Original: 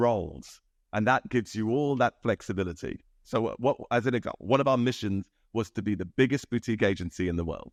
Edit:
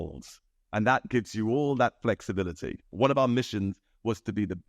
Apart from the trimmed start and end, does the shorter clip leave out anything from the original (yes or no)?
yes